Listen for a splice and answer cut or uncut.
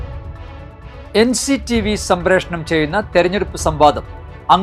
cut